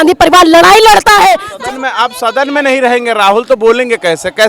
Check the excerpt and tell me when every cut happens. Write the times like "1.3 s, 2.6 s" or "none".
1.5 s